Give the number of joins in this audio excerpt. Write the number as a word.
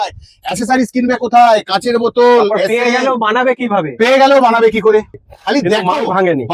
one